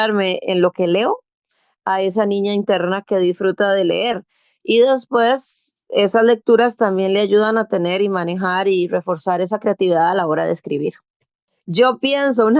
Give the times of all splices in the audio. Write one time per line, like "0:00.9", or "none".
0:11.2